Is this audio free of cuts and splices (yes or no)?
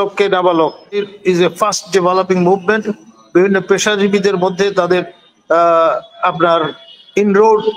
no